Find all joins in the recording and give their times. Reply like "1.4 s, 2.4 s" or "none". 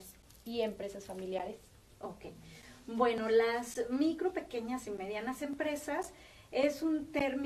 none